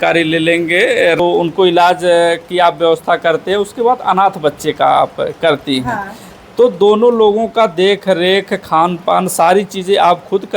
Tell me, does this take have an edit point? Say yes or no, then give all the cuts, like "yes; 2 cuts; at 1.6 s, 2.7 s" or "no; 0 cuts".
yes; 1 cut; at 1.2 s